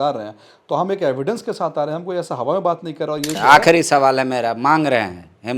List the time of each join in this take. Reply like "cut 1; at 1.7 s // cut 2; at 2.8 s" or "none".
cut 1; at 3.4 s

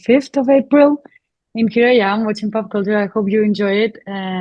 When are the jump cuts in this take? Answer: none

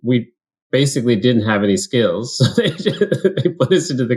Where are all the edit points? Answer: none

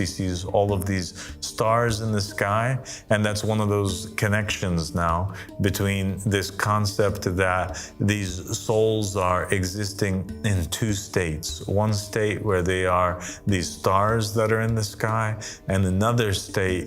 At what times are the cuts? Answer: none

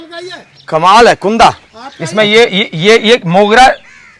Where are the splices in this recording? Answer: none

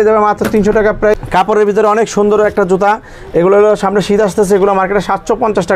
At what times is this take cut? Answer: cut 1; at 1.1 s

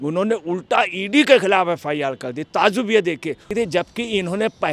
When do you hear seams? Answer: cut 1; at 3.4 s

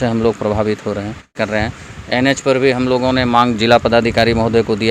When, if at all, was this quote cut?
cut 1; at 1.3 s

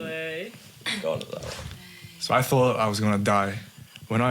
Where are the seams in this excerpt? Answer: cut 1; at 1.5 s

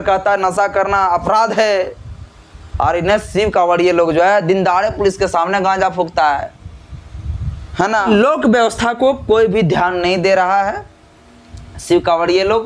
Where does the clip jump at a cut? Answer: cut 1; at 8.4 s

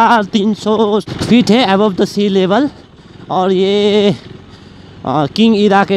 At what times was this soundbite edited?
cut 1; at 1.1 s

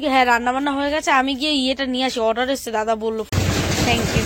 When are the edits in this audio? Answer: cut 1; at 3.3 s

